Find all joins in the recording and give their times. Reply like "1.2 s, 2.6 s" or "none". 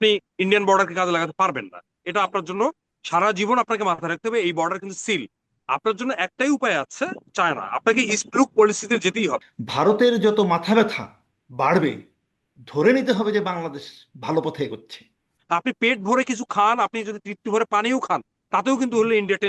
9.4 s, 15.3 s